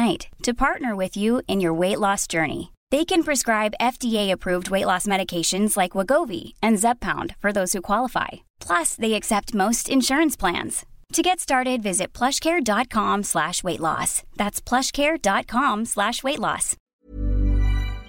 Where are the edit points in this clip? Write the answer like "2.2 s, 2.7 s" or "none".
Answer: 16.9 s